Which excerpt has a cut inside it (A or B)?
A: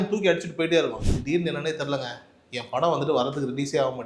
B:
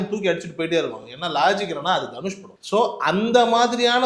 A